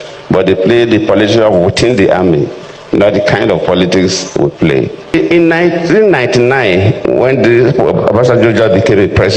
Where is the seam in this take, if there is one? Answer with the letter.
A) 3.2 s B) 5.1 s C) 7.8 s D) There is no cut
B